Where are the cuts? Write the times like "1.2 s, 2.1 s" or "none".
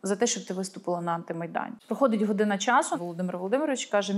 1.8 s, 2.9 s